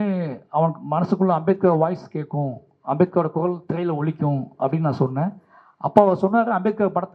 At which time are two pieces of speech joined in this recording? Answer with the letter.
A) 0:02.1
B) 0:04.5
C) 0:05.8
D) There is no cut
D